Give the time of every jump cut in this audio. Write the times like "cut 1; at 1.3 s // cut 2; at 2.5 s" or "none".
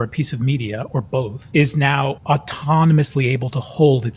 cut 1; at 1.4 s // cut 2; at 2.2 s